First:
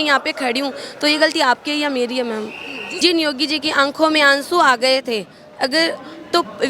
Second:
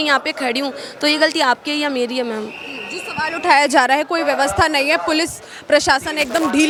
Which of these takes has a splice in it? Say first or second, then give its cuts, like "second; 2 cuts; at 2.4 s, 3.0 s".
first; 1 cut; at 2.9 s